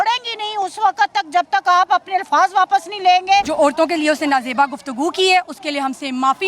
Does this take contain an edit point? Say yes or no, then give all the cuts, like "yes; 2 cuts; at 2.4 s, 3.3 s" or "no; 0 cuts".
yes; 1 cut; at 3.5 s